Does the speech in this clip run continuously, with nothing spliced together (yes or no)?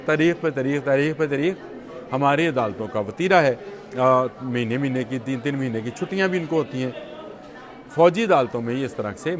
yes